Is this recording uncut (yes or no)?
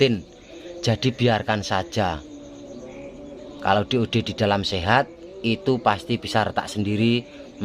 yes